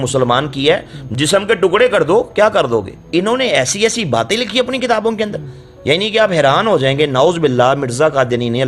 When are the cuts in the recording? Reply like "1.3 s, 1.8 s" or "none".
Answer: 3.0 s